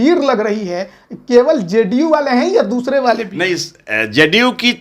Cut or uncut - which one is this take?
uncut